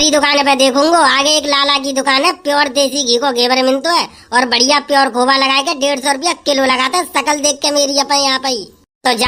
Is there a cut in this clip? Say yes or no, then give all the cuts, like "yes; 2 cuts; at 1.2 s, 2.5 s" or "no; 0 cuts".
no; 0 cuts